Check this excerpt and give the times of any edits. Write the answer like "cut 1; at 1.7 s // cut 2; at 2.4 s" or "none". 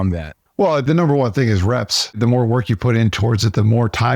cut 1; at 0.8 s // cut 2; at 2.2 s